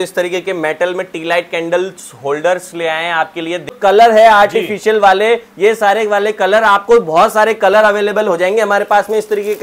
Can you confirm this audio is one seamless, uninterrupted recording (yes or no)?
no